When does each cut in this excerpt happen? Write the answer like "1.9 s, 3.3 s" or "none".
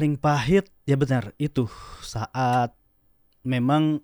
none